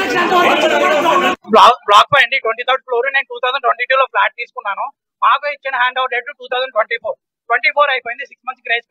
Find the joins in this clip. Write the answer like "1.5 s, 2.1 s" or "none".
1.4 s